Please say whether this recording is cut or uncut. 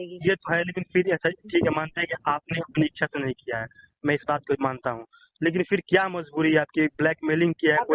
uncut